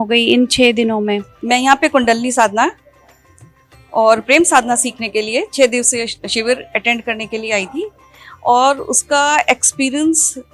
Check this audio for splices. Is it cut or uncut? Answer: cut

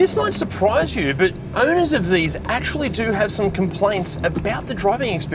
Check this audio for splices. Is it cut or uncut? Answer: uncut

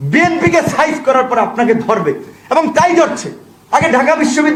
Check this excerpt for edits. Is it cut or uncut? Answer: uncut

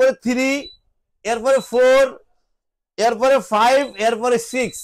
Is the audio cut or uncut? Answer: uncut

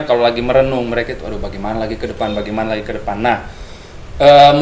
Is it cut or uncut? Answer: uncut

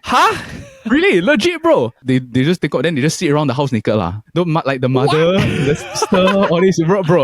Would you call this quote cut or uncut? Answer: cut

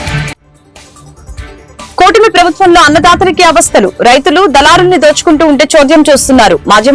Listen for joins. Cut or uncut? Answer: cut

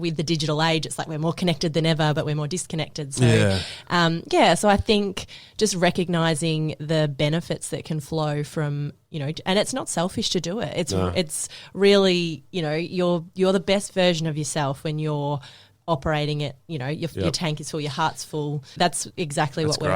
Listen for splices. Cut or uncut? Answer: cut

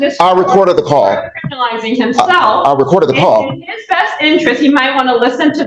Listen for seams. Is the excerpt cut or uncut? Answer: uncut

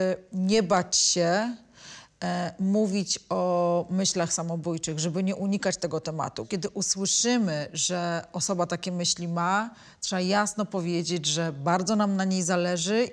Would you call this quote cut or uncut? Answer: cut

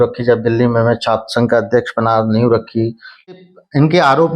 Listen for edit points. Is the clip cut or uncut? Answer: cut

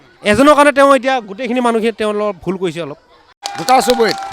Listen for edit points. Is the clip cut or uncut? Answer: cut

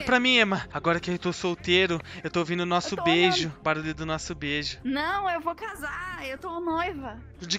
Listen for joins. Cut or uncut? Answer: uncut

